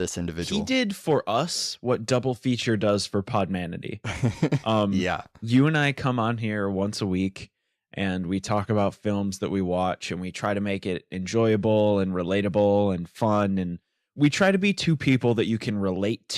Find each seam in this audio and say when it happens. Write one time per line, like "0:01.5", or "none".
0:05.7

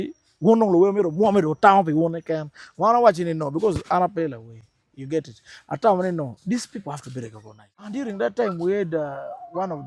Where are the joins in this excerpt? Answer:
0:07.9

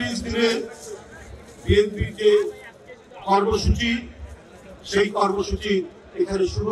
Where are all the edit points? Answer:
none

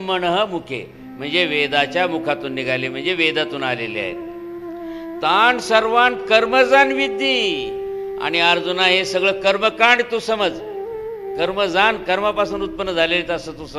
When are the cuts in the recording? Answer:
none

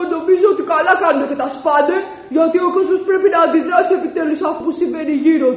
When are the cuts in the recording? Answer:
0:04.6

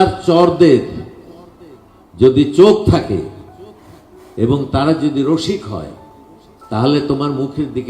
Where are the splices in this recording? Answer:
none

